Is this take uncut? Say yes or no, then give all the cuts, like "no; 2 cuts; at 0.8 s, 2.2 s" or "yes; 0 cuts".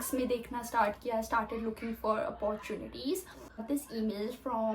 no; 1 cut; at 3.6 s